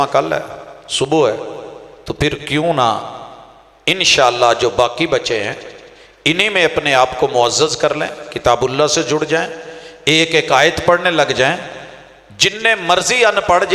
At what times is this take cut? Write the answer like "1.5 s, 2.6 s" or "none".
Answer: none